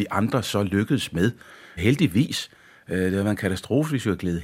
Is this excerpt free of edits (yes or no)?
no